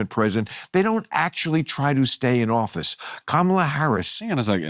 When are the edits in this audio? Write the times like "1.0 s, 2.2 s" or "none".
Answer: none